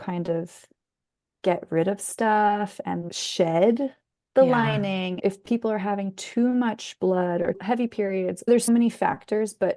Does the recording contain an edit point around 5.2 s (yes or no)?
yes